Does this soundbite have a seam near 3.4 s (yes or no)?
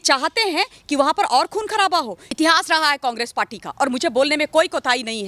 no